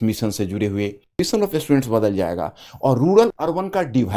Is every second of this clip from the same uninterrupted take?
no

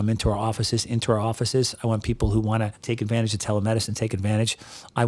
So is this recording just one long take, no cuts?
no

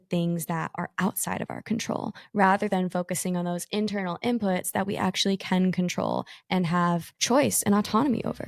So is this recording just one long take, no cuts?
no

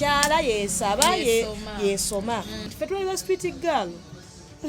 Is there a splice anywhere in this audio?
yes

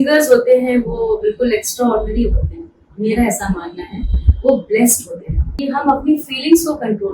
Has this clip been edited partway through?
yes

